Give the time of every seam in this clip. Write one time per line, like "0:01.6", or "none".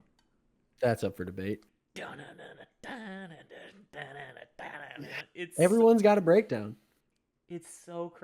0:01.8